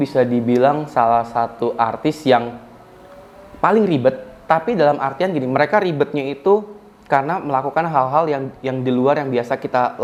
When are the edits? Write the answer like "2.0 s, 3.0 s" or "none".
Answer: none